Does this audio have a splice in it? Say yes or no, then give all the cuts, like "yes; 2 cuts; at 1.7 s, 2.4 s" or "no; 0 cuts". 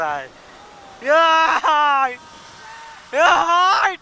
no; 0 cuts